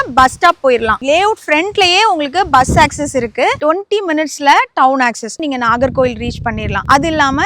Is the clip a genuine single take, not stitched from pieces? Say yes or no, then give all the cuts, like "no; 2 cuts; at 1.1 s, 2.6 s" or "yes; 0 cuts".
yes; 0 cuts